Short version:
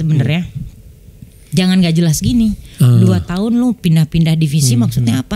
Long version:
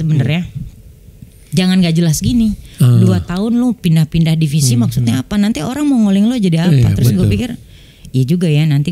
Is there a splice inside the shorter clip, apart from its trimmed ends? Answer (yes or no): no